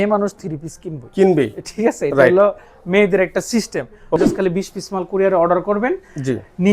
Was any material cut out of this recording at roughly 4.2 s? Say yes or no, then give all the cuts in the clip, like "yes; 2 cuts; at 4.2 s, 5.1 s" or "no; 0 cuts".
yes; 1 cut; at 4.2 s